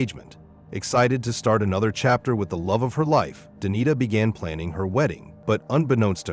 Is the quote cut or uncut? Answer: cut